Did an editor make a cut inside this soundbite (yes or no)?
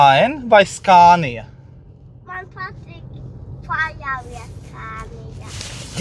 no